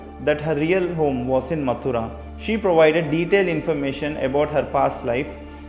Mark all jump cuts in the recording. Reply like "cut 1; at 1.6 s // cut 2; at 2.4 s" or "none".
cut 1; at 2.2 s